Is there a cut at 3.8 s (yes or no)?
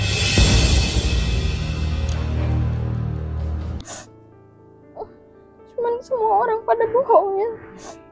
yes